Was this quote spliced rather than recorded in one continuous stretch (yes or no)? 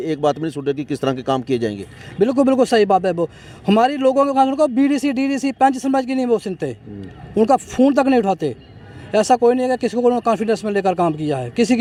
no